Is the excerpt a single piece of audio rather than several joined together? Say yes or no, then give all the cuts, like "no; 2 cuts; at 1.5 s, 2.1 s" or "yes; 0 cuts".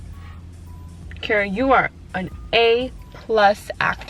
yes; 0 cuts